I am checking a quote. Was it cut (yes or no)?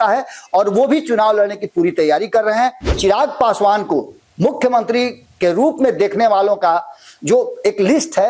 yes